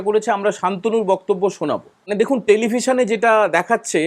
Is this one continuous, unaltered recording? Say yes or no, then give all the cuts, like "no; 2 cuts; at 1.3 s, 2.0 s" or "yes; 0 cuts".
no; 1 cut; at 2.1 s